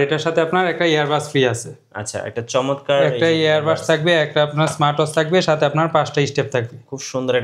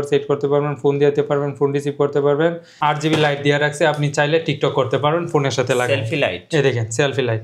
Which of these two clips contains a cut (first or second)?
second